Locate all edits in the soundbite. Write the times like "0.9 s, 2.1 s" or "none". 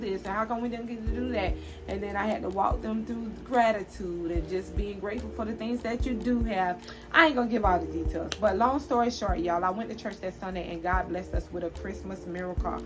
6.9 s